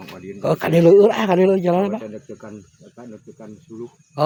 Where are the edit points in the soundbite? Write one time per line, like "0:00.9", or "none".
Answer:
none